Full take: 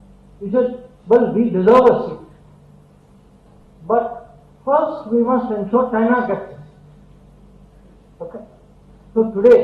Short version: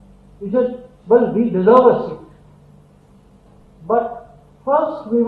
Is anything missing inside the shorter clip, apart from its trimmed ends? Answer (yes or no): no